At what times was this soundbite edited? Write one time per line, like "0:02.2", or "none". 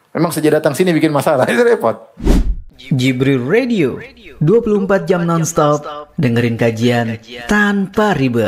0:02.1

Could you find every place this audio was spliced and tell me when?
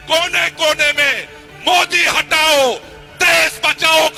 none

